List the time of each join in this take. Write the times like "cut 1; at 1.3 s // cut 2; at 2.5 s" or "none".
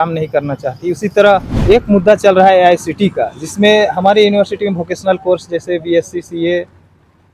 cut 1; at 1.5 s